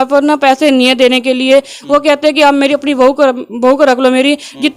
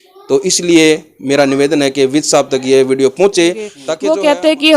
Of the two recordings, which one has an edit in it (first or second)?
second